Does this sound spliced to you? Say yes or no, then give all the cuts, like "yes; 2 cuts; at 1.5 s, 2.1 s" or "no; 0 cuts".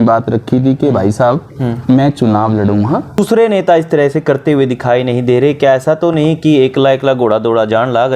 yes; 1 cut; at 3.2 s